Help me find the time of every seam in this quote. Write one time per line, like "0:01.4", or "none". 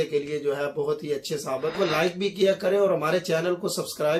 0:01.8